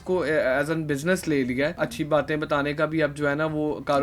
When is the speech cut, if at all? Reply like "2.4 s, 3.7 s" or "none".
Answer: 1.8 s